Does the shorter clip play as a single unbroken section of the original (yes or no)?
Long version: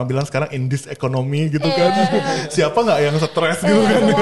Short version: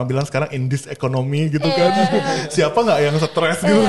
yes